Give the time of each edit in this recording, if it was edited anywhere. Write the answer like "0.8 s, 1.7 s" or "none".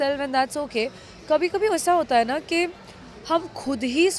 none